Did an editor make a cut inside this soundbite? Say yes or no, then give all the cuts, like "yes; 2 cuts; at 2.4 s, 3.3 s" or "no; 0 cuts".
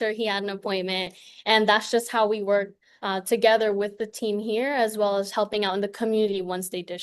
no; 0 cuts